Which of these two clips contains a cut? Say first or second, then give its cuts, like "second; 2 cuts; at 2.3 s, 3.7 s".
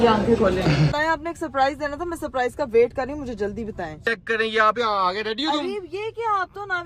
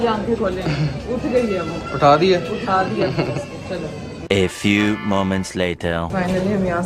first; 2 cuts; at 0.9 s, 4.0 s